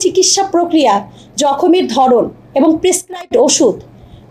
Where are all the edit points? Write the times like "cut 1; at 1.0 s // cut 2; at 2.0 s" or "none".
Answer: none

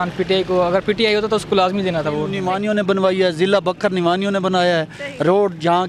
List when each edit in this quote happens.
cut 1; at 2.4 s

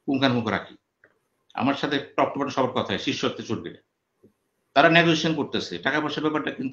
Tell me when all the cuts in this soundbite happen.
none

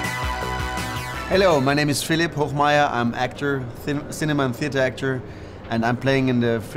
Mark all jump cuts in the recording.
cut 1; at 1.0 s

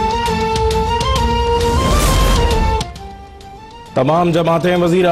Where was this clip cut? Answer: cut 1; at 1.5 s

